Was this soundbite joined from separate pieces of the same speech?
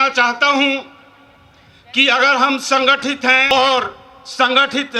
yes; 1 cut; at 3.5 s

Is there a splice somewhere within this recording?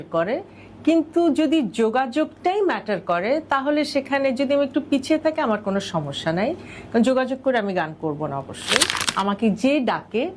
yes; 1 cut; at 9.0 s

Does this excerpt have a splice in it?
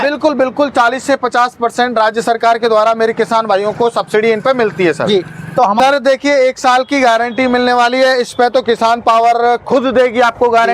yes; 1 cut; at 5.8 s

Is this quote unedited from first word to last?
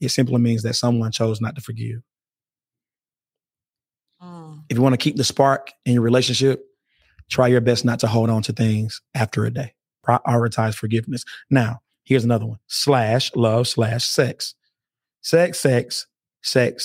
no; 1 cut; at 9.9 s

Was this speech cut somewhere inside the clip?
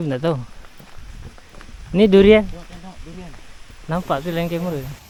no; 0 cuts

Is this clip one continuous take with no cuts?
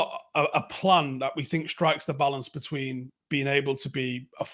yes; 0 cuts

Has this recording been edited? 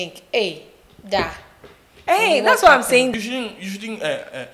yes; 1 cut; at 3.1 s

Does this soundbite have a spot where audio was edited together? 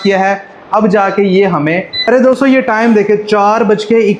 yes; 1 cut; at 1.9 s

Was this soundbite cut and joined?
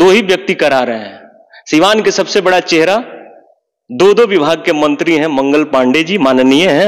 no; 0 cuts

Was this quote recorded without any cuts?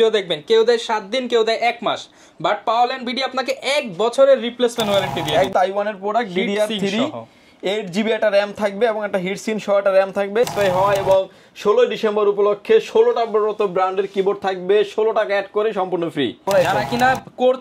no; 3 cuts; at 5.5 s, 10.5 s, 16.4 s

